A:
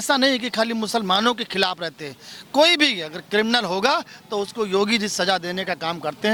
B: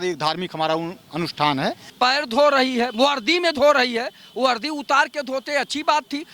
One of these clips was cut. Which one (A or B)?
B